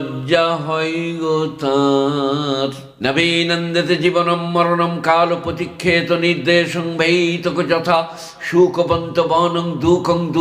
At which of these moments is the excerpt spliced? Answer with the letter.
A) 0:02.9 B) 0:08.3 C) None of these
A